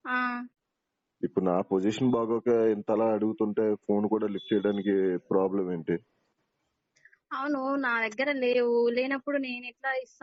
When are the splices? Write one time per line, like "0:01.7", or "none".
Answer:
none